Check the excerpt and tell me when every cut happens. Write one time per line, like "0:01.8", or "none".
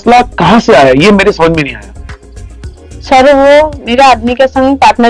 none